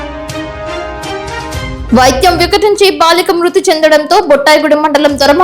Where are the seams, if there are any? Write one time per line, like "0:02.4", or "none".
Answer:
0:01.0

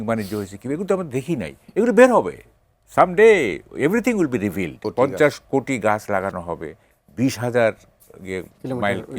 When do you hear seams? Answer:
0:04.8

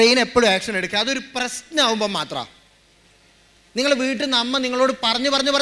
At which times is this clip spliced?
none

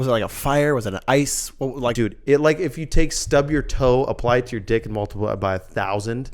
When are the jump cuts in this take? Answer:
0:01.9

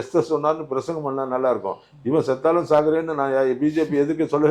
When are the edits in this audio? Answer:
none

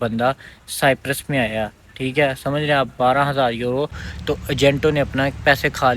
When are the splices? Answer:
0:04.1

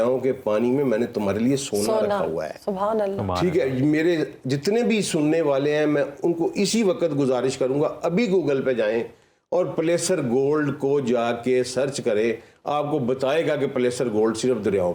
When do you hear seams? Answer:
none

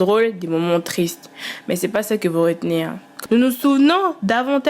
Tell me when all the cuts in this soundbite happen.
0:03.0

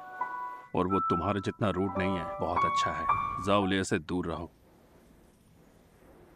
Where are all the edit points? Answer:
0:02.3
0:03.4

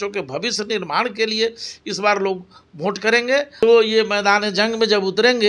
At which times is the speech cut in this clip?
0:03.6

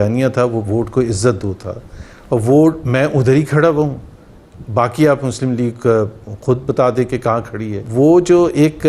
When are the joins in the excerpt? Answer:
0:07.8

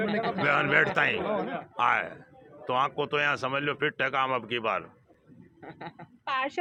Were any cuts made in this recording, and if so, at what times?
none

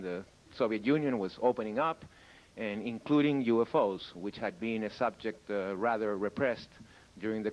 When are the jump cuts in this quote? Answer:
0:04.2

